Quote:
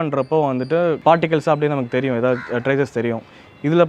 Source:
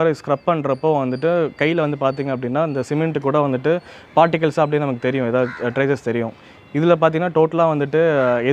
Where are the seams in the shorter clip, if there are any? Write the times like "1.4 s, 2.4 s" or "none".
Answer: 1.0 s

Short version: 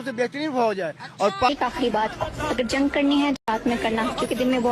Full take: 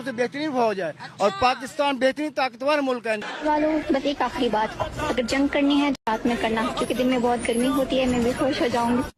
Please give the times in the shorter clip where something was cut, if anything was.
1.5 s

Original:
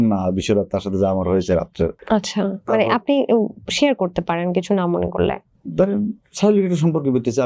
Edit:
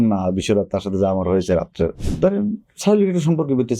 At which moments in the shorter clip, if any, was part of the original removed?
2.0 s

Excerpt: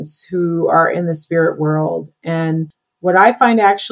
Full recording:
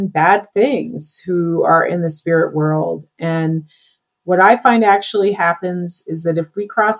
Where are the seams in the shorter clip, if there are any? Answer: 2.8 s

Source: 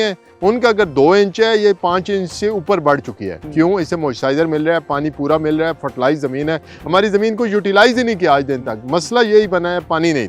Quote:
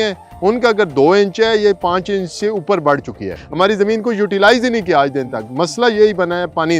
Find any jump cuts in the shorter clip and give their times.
3.4 s

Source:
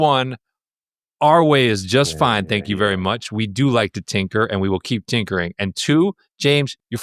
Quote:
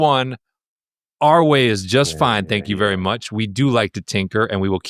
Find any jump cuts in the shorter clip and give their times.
none

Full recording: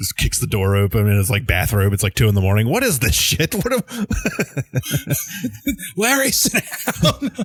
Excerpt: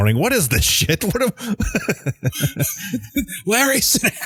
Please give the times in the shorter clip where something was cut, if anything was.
none

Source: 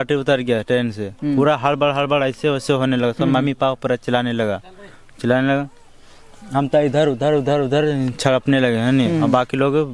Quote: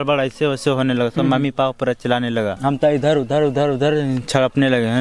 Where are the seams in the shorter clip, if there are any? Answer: 2.6 s

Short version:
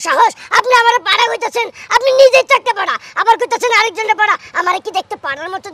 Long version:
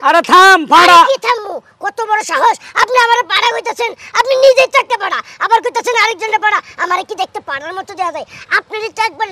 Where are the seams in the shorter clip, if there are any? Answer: none

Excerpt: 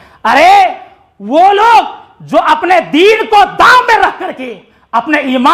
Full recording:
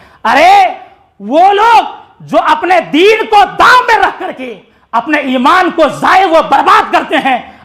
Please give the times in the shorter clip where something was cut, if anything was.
none

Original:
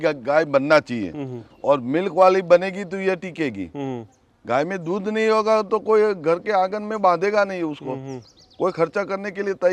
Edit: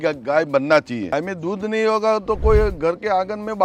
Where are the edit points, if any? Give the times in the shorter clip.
1.1 s

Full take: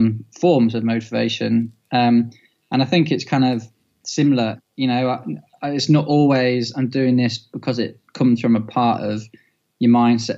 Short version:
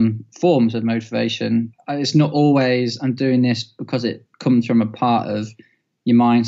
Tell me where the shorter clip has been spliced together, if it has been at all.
1.8 s

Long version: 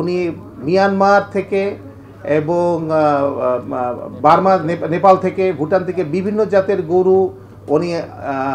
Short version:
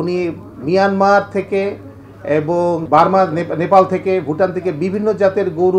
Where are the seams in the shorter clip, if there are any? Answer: 2.8 s

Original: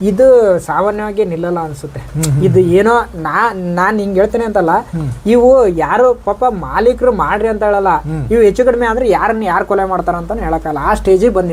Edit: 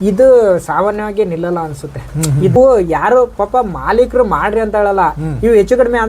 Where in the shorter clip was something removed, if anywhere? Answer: 2.5 s

